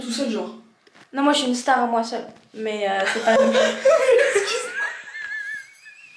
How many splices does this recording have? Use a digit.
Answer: 0